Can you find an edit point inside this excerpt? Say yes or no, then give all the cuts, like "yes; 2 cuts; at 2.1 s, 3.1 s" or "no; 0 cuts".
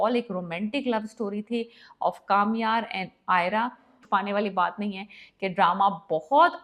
yes; 1 cut; at 4.0 s